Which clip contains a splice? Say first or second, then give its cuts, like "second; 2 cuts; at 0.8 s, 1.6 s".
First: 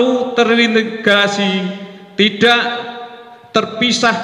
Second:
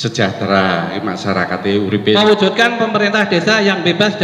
second; 1 cut; at 2.2 s